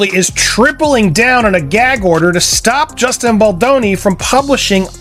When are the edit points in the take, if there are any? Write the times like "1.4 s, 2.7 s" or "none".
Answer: none